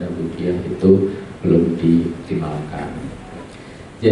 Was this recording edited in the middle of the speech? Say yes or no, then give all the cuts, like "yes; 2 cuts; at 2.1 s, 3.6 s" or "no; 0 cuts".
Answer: no; 0 cuts